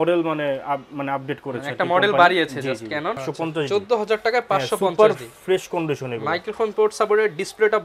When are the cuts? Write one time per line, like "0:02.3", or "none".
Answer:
0:03.2